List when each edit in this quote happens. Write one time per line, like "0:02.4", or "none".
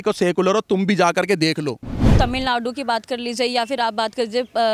0:02.1